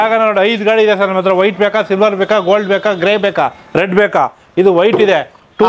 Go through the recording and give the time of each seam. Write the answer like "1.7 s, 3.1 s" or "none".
none